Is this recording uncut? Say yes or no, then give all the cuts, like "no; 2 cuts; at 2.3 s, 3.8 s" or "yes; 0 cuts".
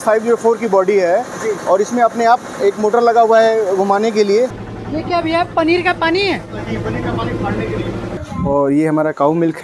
no; 2 cuts; at 4.6 s, 8.1 s